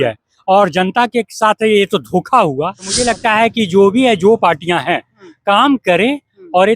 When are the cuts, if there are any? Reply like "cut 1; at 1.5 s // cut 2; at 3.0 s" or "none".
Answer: cut 1; at 2.9 s